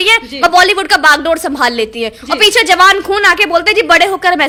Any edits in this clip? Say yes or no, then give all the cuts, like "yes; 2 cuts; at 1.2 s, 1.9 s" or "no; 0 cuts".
no; 0 cuts